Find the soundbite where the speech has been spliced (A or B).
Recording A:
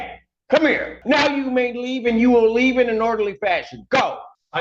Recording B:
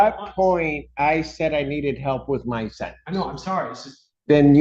A